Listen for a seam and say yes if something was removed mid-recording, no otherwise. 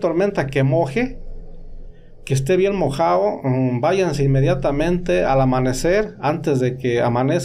no